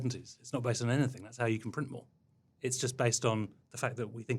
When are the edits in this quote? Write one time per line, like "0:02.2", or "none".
0:02.5